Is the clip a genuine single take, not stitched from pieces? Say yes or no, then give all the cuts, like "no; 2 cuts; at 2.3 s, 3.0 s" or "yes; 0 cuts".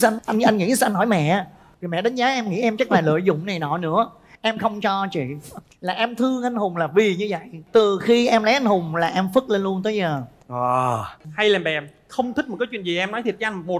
no; 1 cut; at 11.2 s